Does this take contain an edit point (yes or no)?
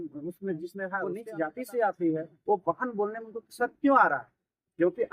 yes